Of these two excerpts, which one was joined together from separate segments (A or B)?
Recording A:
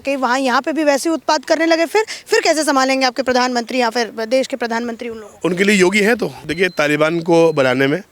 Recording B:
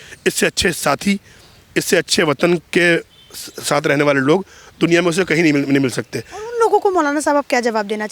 A